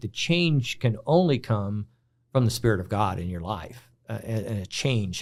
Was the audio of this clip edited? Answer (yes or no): no